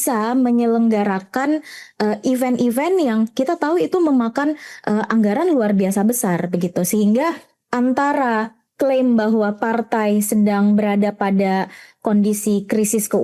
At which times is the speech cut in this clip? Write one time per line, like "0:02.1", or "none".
none